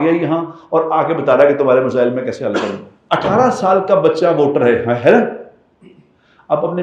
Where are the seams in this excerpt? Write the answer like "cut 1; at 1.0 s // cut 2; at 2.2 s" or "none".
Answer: cut 1; at 2.9 s